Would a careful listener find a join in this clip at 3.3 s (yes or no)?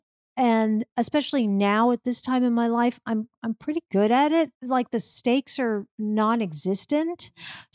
no